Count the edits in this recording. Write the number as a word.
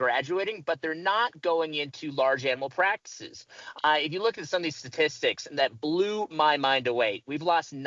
zero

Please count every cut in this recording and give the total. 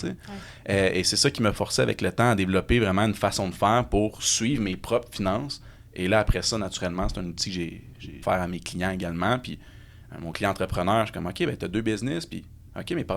one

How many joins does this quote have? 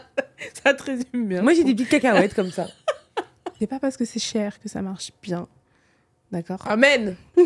one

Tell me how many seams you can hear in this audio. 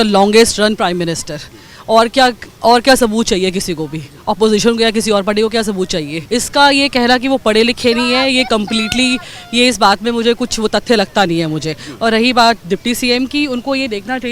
one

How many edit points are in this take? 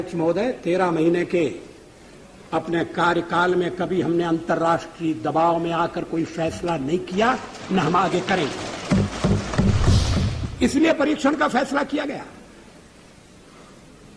one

